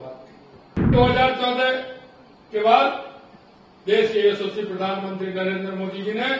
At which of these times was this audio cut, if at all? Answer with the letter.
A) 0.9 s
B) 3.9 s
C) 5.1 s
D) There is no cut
A